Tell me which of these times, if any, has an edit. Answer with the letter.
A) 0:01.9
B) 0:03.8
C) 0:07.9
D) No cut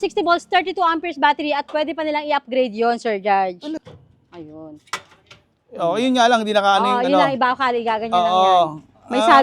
B